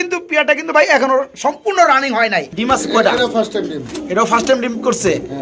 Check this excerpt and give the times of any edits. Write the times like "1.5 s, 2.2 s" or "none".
2.5 s